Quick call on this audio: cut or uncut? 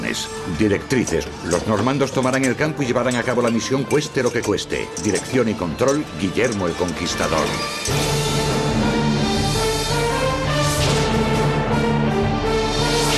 uncut